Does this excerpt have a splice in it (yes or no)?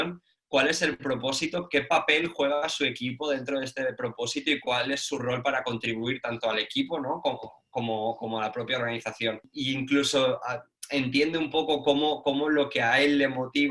yes